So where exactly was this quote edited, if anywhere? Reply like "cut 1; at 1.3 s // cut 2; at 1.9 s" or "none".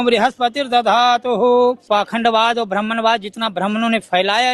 cut 1; at 1.8 s